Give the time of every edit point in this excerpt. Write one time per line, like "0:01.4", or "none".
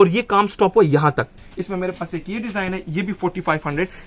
0:01.3